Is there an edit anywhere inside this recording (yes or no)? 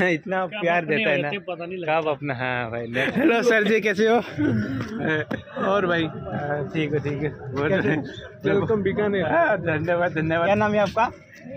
yes